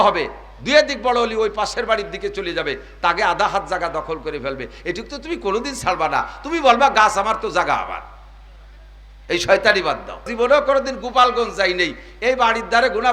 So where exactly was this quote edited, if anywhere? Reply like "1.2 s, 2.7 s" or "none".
10.3 s